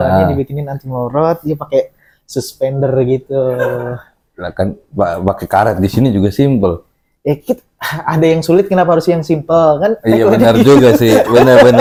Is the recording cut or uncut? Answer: uncut